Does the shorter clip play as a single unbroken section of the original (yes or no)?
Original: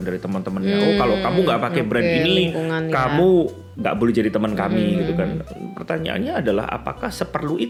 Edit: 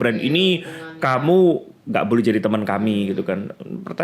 yes